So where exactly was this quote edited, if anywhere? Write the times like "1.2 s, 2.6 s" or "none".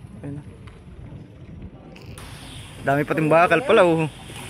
2.2 s